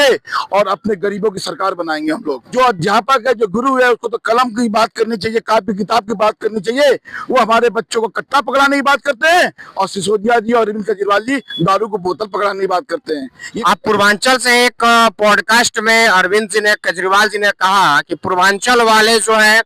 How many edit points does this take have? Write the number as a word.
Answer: two